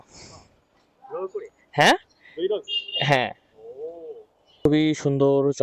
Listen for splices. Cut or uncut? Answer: cut